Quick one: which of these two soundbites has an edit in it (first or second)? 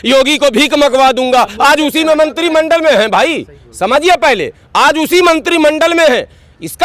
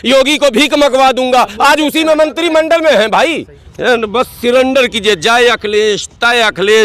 second